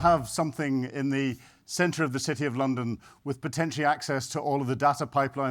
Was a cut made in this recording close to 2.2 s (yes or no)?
no